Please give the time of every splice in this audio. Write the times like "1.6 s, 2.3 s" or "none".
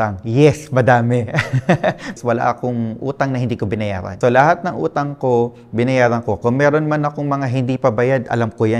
2.1 s, 4.1 s